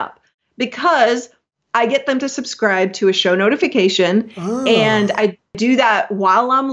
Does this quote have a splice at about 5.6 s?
yes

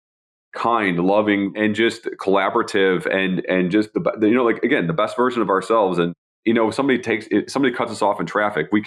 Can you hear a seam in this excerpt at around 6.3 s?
yes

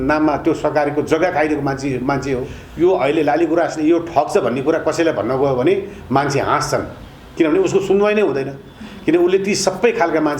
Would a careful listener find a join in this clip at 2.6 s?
yes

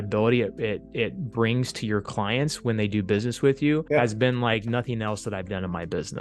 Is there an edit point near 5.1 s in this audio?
no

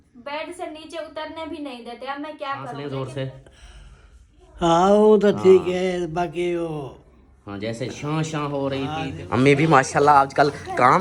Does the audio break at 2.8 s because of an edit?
yes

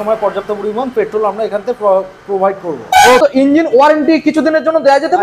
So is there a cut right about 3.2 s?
yes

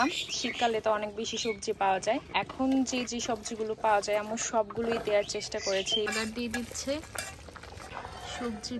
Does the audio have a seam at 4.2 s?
no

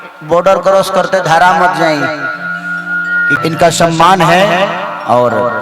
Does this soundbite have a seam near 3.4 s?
yes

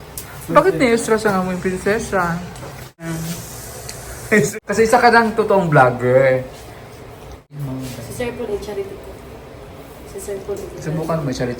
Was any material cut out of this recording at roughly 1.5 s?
no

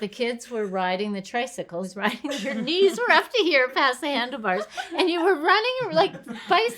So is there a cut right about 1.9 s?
yes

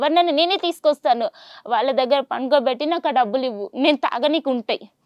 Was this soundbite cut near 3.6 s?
no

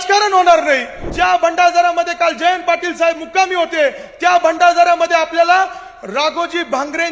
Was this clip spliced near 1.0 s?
yes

